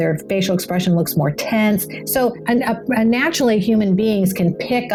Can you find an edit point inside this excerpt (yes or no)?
no